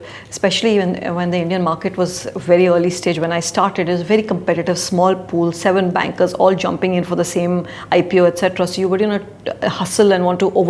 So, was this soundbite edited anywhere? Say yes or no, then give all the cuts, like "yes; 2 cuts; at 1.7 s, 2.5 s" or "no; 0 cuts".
no; 0 cuts